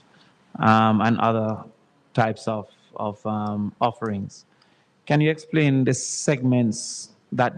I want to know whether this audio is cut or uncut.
uncut